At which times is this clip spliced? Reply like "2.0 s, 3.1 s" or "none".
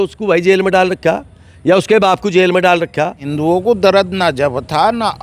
3.3 s